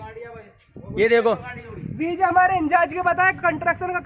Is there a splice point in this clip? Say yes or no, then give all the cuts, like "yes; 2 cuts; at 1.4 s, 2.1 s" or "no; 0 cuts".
no; 0 cuts